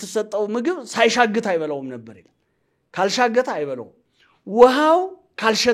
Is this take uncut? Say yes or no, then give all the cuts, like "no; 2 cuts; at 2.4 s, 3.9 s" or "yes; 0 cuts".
yes; 0 cuts